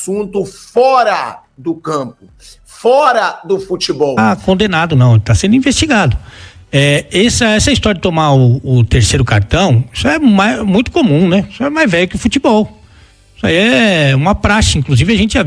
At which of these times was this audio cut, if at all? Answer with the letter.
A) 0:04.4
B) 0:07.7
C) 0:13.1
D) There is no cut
A